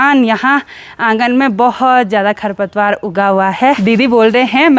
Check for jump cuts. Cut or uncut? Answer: cut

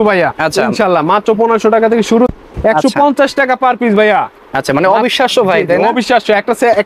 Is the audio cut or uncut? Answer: cut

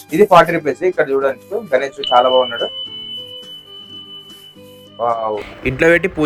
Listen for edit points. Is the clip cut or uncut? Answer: uncut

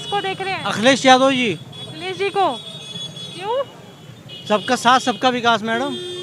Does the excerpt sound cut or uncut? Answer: uncut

